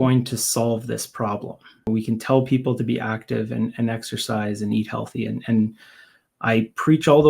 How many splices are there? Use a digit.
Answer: 1